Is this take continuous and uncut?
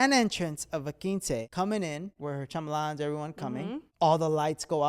no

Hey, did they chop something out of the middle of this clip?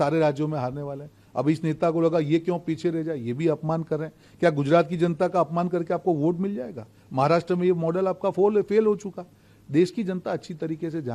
no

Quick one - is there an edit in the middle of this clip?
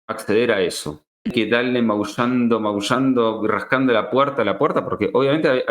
yes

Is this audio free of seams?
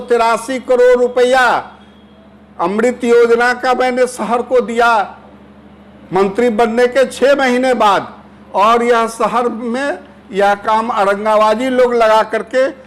yes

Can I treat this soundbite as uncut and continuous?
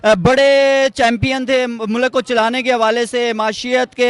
yes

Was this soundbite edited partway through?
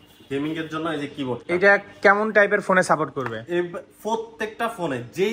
no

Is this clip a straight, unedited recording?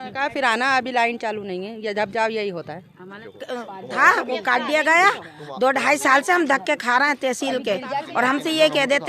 no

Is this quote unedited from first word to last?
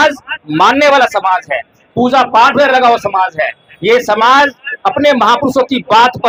yes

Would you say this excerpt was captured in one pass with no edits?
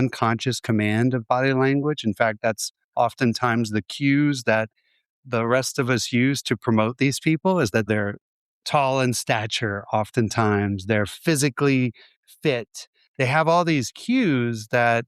no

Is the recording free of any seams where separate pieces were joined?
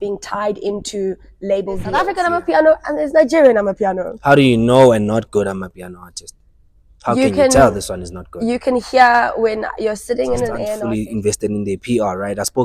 no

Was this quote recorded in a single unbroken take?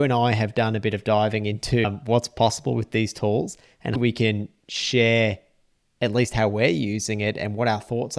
no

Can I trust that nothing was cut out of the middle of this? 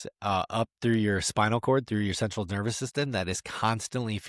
yes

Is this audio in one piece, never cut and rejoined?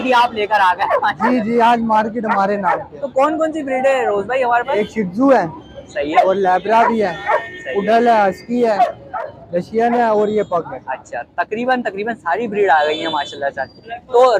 yes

